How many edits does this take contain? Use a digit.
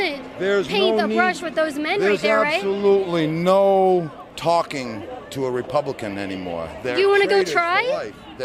0